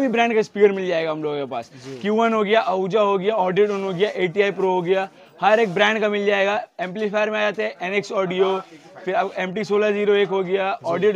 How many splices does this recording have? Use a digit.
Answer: 0